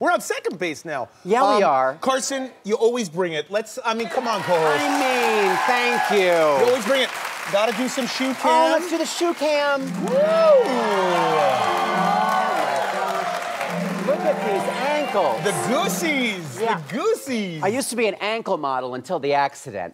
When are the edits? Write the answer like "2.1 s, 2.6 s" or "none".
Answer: 14.0 s